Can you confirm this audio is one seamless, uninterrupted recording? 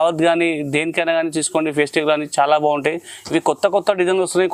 yes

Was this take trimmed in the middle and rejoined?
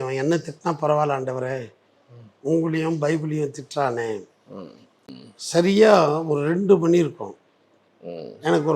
yes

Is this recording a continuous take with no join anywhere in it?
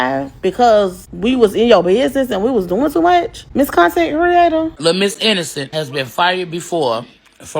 no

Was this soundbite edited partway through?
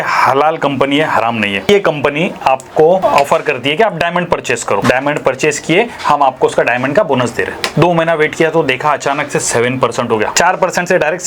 yes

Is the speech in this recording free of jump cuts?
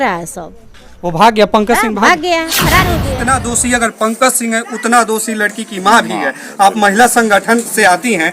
no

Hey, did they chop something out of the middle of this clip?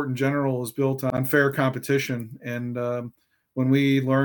no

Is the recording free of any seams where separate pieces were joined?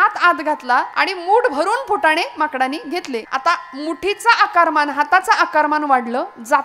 no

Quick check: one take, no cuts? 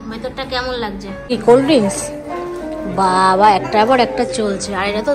no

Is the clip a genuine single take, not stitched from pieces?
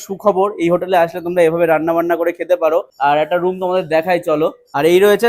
yes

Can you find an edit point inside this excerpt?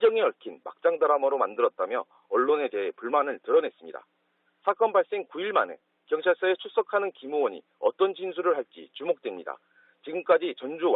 yes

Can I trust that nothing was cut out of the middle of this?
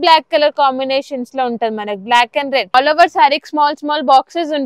no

